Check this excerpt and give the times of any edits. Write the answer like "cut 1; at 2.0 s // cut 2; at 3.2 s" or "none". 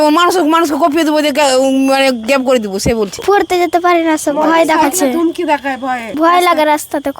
cut 1; at 3.1 s // cut 2; at 6.1 s